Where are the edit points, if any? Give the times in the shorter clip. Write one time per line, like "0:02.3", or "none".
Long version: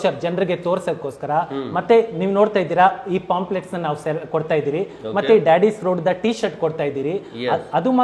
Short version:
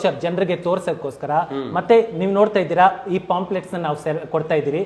none